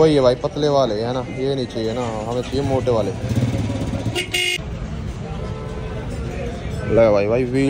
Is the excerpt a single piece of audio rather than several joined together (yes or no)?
yes